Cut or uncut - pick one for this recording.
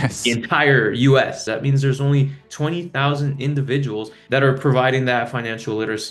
cut